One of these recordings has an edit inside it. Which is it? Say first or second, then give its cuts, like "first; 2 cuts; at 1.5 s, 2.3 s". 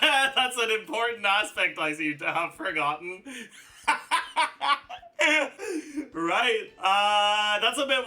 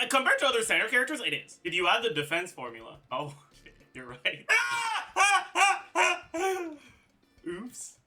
first; 1 cut; at 5.6 s